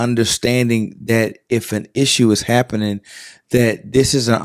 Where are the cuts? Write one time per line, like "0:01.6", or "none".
none